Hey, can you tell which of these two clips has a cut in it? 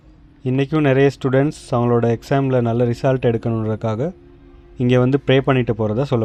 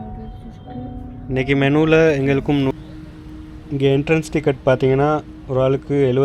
second; 1 cut; at 2.7 s

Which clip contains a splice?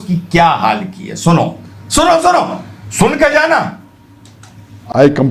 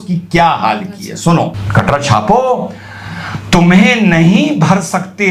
second; 1 cut; at 1.6 s

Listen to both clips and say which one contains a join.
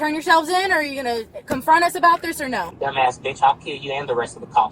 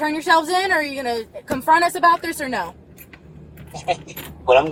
first; 1 cut; at 2.7 s

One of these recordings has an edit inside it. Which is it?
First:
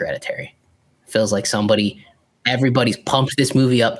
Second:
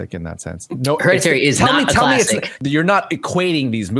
second; 1 cut; at 2.5 s

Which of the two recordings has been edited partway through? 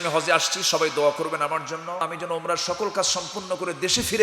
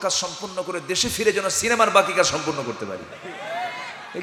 first; 1 cut; at 2.0 s

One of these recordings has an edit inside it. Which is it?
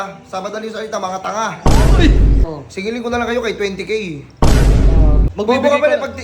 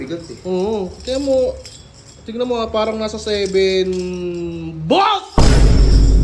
first; 2 cuts; at 2.4 s, 5.2 s

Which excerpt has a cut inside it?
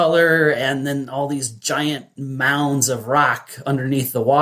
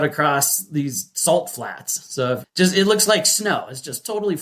second; 1 cut; at 2.4 s

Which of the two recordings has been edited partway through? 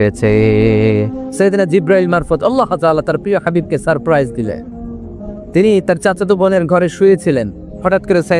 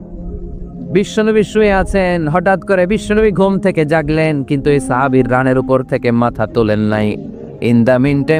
first; 1 cut; at 1.0 s

